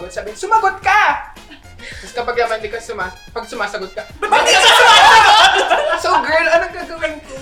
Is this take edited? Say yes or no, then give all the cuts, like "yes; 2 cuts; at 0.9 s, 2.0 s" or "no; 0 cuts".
no; 0 cuts